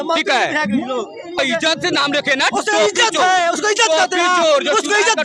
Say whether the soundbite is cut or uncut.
cut